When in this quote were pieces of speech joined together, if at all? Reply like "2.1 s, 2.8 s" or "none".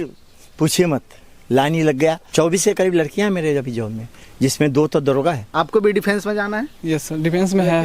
2.2 s, 5.4 s